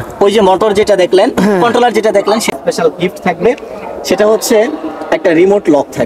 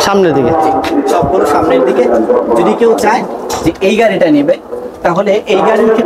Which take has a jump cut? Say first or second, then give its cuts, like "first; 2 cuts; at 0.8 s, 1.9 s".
first; 1 cut; at 2.5 s